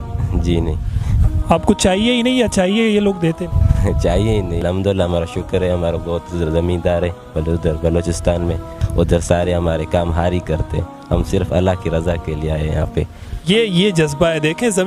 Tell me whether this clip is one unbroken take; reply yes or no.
no